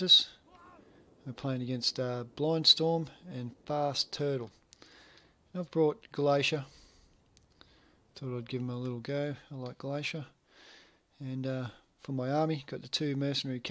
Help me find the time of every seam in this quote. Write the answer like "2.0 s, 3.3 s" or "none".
none